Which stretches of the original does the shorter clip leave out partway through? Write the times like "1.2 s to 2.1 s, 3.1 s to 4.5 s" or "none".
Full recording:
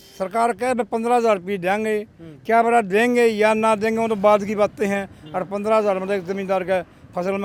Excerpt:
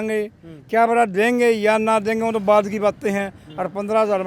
none